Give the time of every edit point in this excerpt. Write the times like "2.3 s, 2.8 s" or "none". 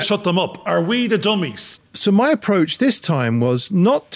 1.6 s